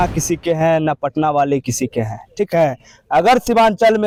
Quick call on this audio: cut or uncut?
uncut